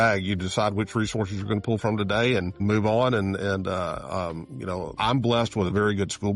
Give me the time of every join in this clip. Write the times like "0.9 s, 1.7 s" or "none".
2.6 s, 4.9 s

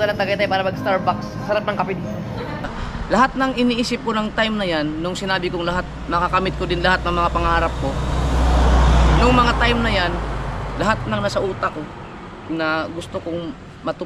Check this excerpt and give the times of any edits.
2.7 s

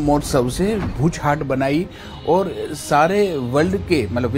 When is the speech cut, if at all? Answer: 0.9 s

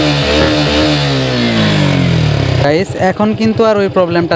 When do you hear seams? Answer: 2.6 s

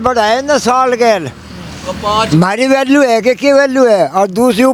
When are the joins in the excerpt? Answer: none

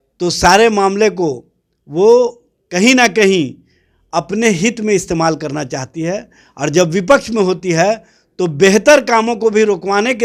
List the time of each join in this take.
none

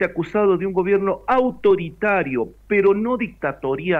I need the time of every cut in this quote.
none

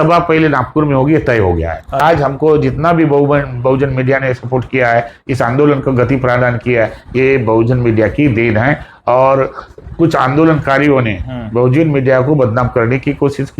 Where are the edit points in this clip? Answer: 2.0 s

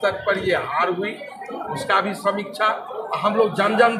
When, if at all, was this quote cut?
none

